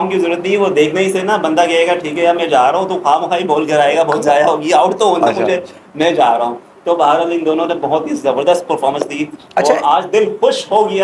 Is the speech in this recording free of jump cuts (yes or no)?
yes